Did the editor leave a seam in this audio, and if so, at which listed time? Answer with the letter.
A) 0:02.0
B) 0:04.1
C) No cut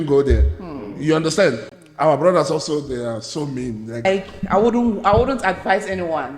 B